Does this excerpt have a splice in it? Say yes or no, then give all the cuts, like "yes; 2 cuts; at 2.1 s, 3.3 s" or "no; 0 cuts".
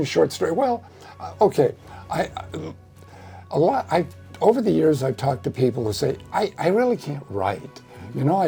no; 0 cuts